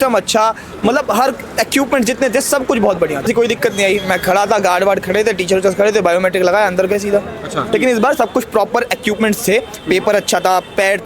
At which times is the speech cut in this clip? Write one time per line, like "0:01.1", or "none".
0:03.3
0:07.6